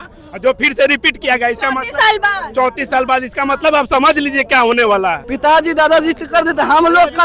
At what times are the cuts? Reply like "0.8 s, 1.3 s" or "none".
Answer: 5.2 s